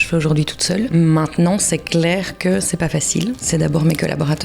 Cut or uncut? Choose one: cut